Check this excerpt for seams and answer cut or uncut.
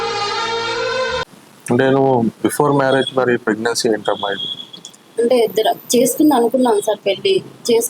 uncut